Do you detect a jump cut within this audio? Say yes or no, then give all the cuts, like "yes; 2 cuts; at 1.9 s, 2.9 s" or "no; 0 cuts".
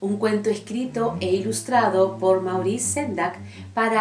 no; 0 cuts